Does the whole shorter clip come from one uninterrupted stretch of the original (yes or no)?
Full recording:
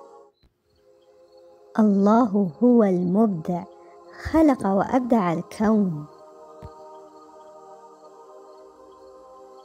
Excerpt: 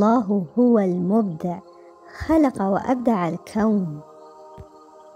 no